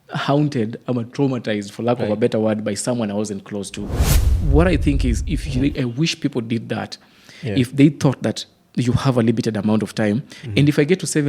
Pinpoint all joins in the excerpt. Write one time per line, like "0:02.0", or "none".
0:04.2